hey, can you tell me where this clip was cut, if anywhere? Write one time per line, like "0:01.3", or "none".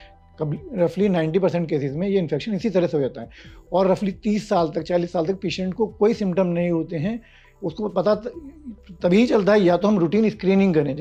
none